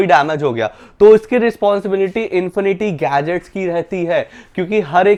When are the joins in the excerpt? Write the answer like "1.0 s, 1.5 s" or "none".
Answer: none

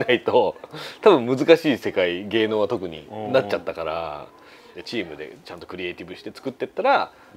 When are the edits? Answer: 4.7 s

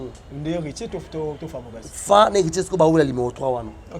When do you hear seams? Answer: none

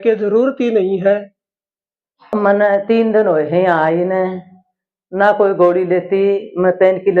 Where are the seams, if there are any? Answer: 2.3 s

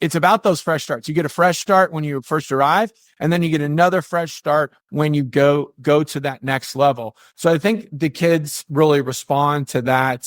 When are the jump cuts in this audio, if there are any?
none

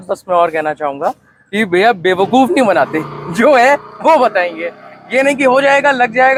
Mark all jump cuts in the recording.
none

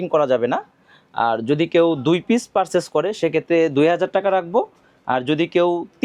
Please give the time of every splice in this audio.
none

